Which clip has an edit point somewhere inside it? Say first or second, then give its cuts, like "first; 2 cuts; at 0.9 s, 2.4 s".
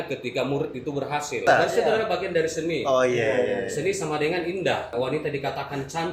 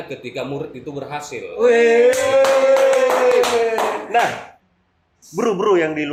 first; 2 cuts; at 1.4 s, 4.9 s